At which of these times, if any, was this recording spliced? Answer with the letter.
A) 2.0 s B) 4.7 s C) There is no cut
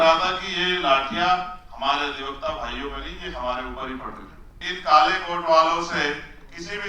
B